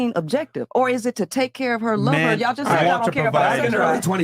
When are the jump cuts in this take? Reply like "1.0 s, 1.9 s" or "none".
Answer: 3.2 s